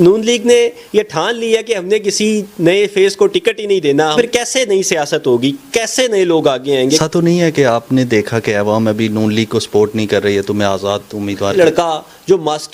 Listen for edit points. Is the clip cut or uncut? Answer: cut